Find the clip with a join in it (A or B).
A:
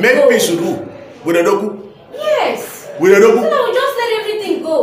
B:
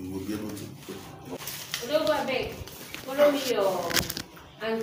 B